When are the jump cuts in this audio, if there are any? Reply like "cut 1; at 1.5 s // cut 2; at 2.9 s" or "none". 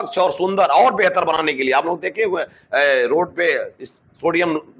none

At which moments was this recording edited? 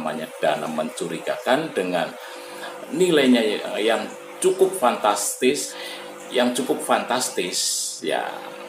cut 1; at 5.7 s

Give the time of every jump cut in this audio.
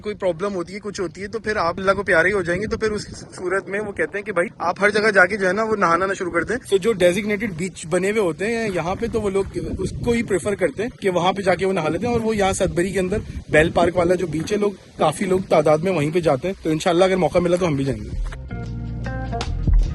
none

